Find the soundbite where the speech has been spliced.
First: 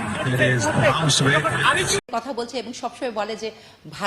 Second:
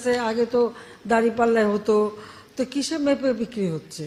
first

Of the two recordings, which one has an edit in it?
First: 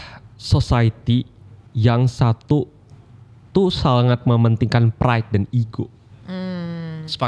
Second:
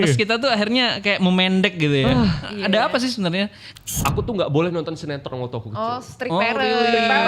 second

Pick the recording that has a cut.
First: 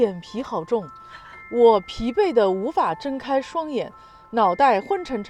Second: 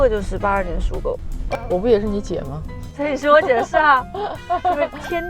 second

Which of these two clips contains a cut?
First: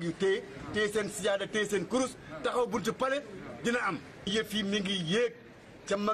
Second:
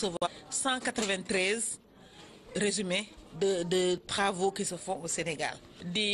first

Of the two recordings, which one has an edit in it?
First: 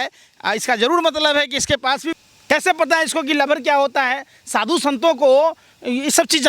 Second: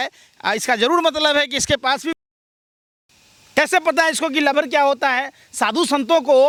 first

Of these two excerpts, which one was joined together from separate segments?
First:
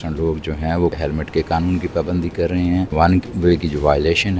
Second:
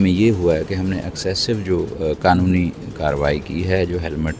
first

